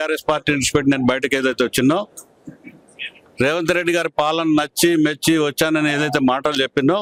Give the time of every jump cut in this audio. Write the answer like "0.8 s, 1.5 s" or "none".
none